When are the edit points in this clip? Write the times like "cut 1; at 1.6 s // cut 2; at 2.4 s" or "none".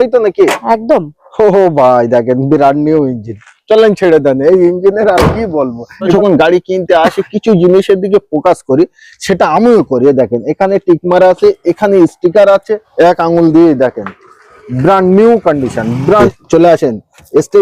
cut 1; at 6.1 s // cut 2; at 12.8 s // cut 3; at 16.2 s